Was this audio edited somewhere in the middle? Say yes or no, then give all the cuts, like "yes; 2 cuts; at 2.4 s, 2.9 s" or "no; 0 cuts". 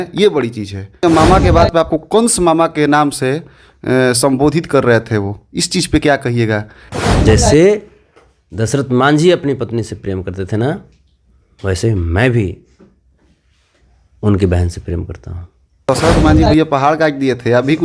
yes; 3 cuts; at 1.0 s, 6.8 s, 15.8 s